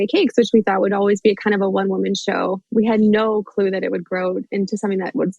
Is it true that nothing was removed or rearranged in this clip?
no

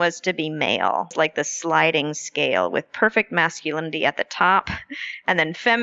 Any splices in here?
yes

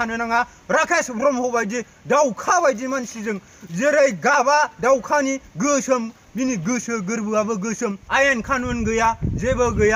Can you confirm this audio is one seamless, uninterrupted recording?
no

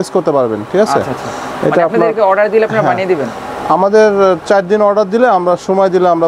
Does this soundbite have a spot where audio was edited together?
no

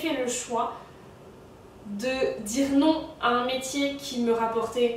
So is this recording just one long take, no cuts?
yes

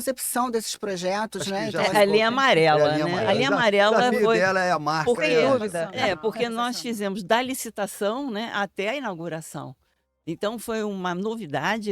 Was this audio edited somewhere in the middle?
yes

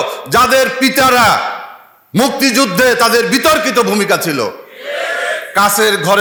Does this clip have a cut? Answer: no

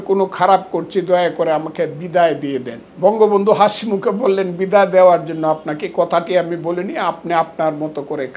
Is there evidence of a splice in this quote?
yes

